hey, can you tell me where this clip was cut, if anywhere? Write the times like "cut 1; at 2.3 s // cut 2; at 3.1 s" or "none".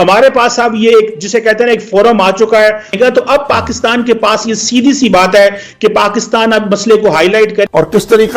cut 1; at 2.9 s // cut 2; at 7.6 s